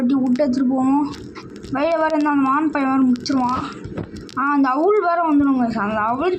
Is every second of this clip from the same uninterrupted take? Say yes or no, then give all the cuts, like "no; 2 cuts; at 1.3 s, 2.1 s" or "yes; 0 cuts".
yes; 0 cuts